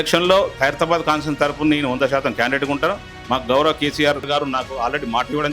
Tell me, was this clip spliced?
yes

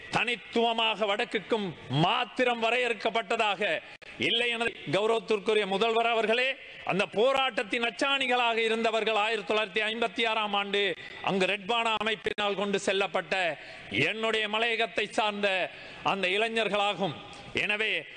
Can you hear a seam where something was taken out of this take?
yes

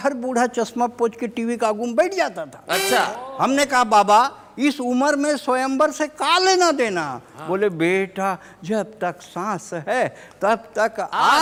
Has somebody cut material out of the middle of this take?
no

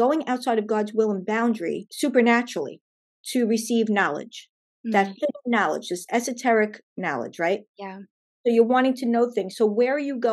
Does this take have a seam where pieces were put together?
yes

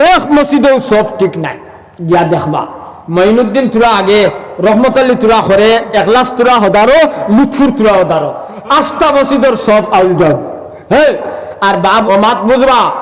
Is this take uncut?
no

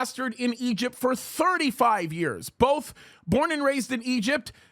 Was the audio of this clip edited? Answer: no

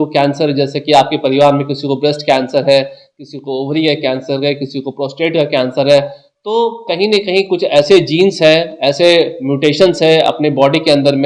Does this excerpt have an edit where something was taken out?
no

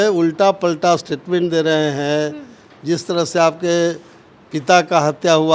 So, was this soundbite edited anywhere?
no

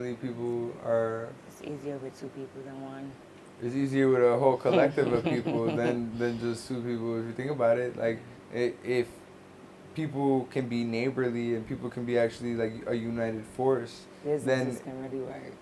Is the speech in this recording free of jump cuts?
yes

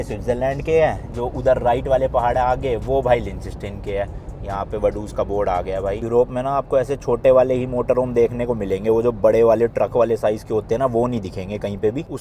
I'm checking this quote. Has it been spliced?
no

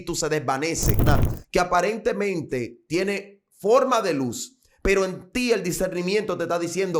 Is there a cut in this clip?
yes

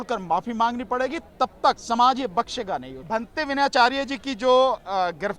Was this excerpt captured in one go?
no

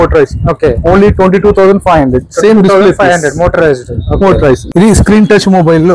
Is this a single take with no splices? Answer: no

